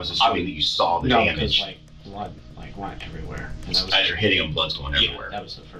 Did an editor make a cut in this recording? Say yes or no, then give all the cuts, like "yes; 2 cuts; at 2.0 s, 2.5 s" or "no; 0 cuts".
no; 0 cuts